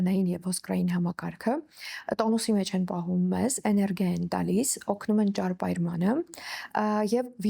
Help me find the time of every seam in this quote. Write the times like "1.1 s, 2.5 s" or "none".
none